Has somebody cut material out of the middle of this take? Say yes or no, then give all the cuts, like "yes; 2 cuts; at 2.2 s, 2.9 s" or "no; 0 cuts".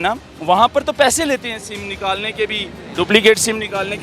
no; 0 cuts